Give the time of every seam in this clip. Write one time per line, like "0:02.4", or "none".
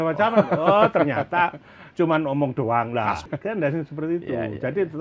0:03.2